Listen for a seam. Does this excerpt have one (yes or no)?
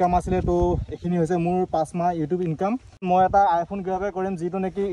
yes